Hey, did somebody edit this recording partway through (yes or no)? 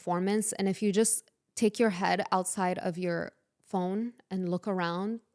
no